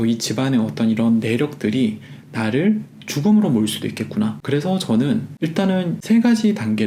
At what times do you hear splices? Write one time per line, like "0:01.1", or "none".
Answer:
none